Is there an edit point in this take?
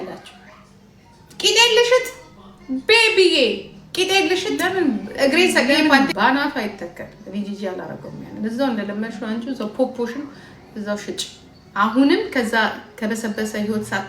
yes; 1 cut; at 5.6 s

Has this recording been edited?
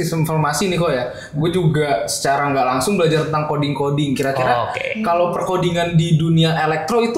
no; 0 cuts

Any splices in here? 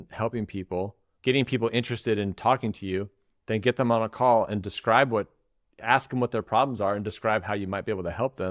yes; 1 cut; at 1.0 s

